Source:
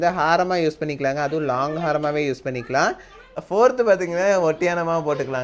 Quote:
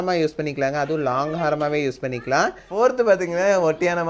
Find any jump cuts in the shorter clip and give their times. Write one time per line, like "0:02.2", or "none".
0:02.6